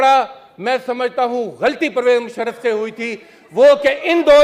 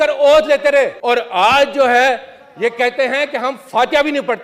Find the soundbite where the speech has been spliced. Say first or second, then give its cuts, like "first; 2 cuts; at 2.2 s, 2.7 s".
second; 1 cut; at 1.0 s